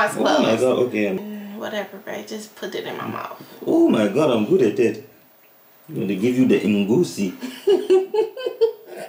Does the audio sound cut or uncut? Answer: cut